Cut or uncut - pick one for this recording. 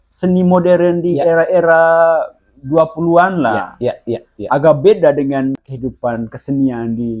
cut